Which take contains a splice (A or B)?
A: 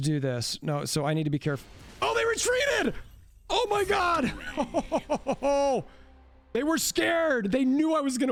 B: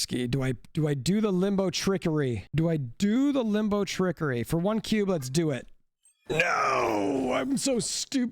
B